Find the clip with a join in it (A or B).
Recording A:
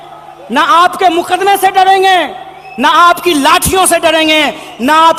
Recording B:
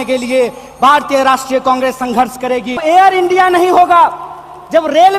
B